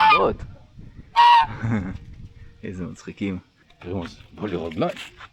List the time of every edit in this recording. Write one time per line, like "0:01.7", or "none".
0:03.5